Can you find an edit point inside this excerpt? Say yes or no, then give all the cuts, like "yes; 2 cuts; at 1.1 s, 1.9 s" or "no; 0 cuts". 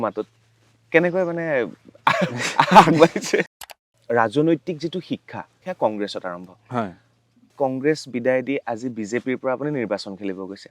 yes; 3 cuts; at 3.7 s, 5.6 s, 7.5 s